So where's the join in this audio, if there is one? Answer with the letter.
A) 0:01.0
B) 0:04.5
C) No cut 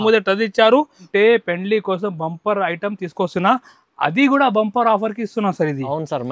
A